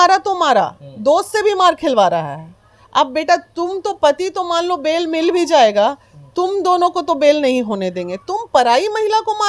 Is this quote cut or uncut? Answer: uncut